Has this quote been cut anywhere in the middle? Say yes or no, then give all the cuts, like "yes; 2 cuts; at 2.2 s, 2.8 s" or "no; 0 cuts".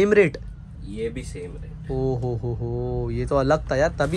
no; 0 cuts